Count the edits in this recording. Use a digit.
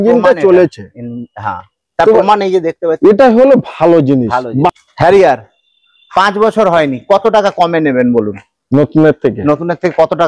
1